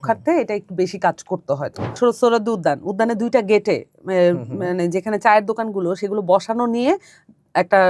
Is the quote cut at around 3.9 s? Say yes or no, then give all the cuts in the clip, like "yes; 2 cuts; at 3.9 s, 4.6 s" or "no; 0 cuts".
no; 1 cut; at 2.0 s